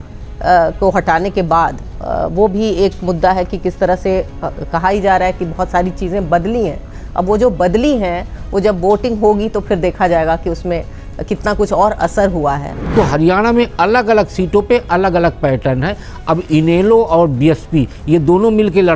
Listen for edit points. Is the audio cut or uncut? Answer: cut